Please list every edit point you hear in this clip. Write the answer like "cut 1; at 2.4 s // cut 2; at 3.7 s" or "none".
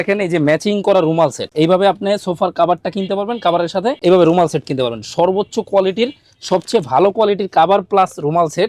none